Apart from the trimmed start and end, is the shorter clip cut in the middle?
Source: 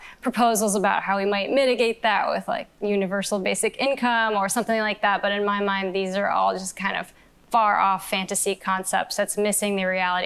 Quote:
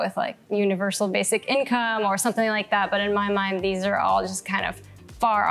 no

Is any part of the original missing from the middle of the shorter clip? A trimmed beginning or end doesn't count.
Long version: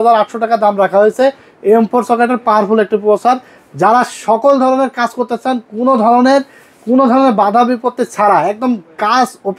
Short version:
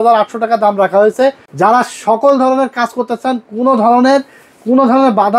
yes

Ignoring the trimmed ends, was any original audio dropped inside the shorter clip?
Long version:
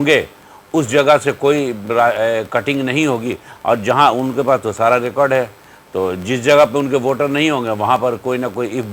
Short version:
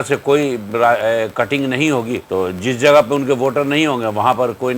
yes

